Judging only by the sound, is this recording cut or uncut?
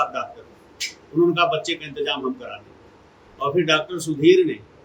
uncut